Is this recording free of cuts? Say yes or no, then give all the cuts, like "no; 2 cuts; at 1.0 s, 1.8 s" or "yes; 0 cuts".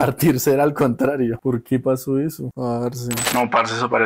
no; 1 cut; at 3.1 s